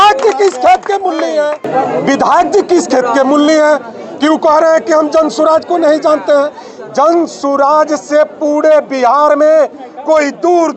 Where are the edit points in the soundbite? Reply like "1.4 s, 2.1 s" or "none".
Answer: 1.6 s